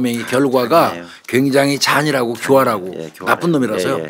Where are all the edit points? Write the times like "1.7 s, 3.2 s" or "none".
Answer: none